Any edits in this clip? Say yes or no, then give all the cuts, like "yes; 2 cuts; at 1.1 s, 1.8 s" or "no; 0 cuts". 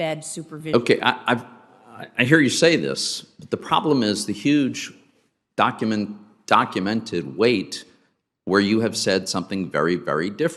no; 0 cuts